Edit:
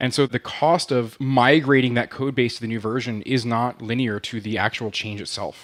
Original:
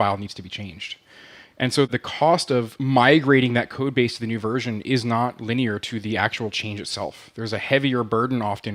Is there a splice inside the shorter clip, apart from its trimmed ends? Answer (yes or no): no